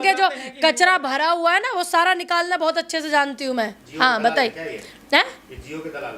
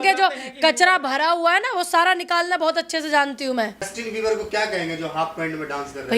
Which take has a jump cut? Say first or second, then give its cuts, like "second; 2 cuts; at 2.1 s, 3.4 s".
second; 1 cut; at 3.9 s